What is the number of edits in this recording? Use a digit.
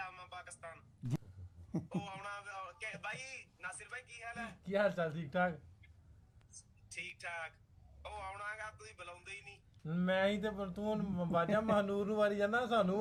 0